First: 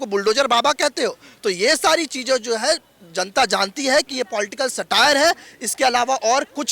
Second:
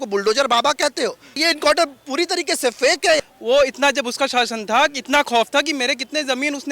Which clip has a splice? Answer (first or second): second